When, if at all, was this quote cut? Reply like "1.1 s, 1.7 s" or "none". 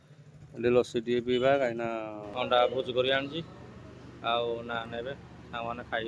2.2 s